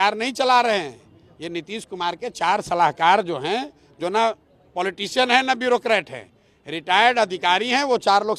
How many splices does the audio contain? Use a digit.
0